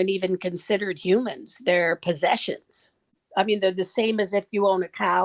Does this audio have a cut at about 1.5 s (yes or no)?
no